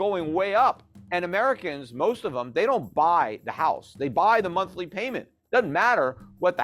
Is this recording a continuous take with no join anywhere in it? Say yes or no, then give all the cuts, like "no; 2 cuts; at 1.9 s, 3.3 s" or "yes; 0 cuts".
no; 1 cut; at 0.9 s